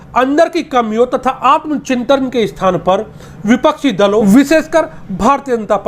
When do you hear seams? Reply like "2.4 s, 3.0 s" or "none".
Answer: 4.2 s